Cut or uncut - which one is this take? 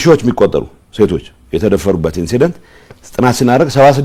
uncut